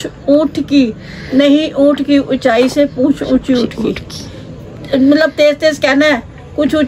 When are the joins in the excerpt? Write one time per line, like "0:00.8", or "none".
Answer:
none